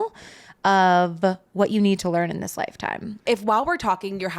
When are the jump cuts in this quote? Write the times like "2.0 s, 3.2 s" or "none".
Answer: 3.1 s